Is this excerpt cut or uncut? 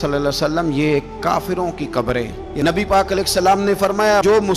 cut